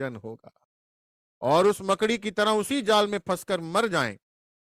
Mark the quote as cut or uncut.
uncut